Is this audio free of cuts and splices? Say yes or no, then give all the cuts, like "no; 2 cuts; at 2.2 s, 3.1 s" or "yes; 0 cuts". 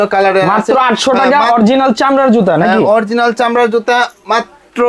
yes; 0 cuts